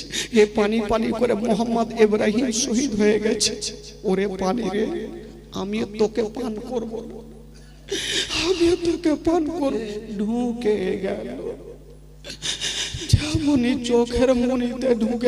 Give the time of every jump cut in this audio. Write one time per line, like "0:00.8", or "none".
0:09.8